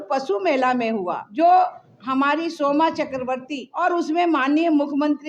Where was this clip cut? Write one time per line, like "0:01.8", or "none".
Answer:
0:01.2
0:03.7